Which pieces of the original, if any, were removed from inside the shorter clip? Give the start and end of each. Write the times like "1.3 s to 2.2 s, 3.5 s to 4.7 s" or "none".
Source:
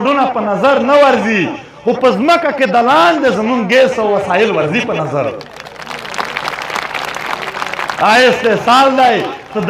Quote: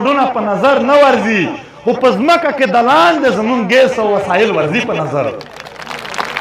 none